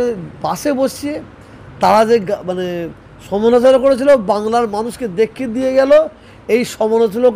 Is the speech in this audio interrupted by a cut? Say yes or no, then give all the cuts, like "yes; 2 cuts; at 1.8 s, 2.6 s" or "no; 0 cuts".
no; 0 cuts